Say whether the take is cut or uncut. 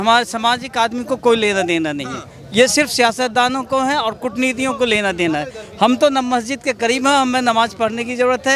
uncut